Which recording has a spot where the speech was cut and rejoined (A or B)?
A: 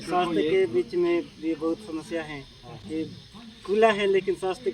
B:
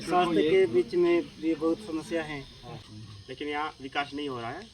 B